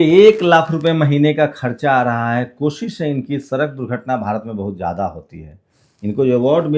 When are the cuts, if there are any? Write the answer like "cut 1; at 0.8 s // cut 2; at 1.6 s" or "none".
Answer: none